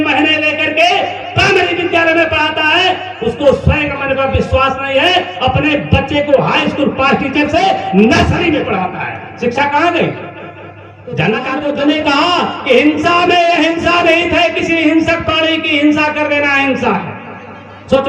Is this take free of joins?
no; 1 cut; at 11.6 s

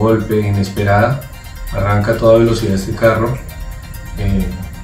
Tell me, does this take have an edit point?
no; 0 cuts

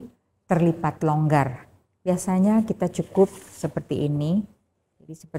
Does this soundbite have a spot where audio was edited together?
no; 0 cuts

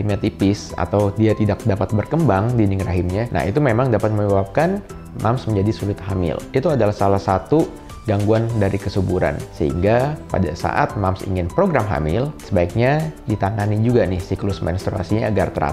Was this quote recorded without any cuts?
yes; 0 cuts

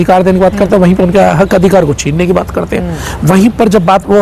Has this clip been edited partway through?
no; 0 cuts

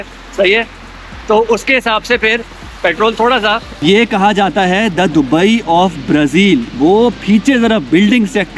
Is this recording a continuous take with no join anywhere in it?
no; 1 cut; at 3.7 s

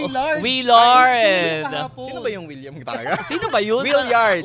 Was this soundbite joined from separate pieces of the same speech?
no; 0 cuts

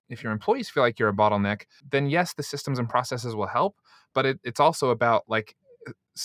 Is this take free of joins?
no; 1 cut; at 1.8 s

